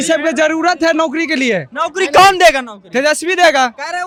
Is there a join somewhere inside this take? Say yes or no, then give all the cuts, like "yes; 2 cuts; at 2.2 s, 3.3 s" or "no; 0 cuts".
no; 0 cuts